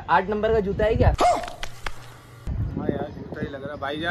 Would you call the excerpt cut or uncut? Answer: uncut